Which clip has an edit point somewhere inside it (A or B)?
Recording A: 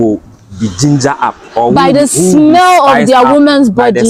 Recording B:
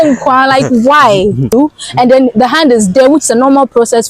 B